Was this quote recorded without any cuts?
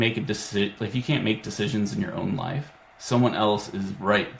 yes; 0 cuts

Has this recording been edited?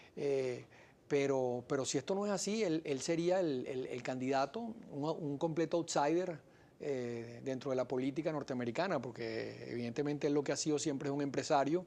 yes; 1 cut; at 3.2 s

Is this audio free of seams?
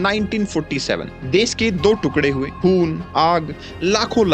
no; 1 cut; at 1.1 s

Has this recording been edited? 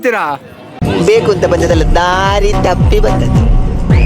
no; 0 cuts

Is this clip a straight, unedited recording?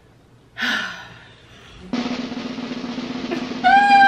yes; 0 cuts

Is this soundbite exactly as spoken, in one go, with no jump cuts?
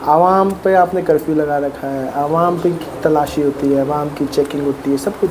yes; 0 cuts

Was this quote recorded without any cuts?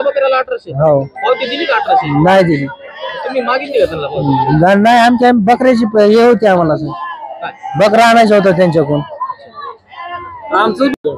yes; 0 cuts

